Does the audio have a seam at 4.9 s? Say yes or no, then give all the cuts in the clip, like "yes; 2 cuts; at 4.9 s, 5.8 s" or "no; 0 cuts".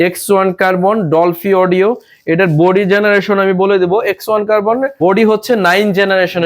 yes; 1 cut; at 4.9 s